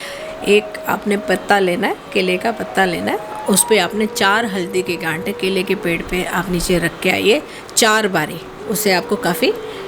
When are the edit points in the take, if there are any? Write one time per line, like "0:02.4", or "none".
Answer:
none